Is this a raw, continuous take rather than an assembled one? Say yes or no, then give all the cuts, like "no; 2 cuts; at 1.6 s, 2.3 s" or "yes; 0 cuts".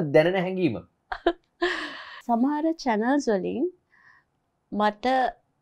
no; 1 cut; at 2.1 s